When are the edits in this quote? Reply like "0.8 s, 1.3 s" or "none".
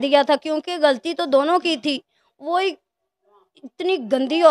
none

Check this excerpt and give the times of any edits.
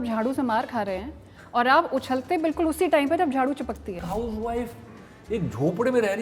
4.0 s

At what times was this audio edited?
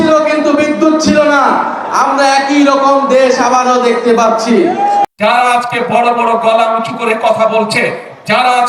5.1 s

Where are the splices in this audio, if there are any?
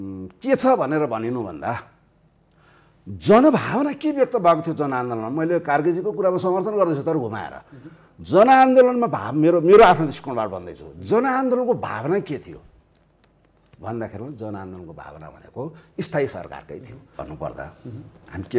17.2 s

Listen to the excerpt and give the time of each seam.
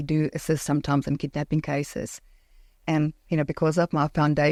none

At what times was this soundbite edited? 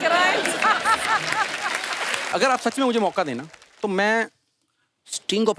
2.2 s

